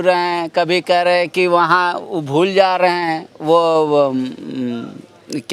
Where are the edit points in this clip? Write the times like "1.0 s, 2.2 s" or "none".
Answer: none